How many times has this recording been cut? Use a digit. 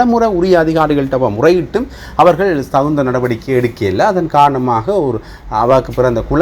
0